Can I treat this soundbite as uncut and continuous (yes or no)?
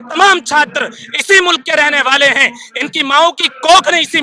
yes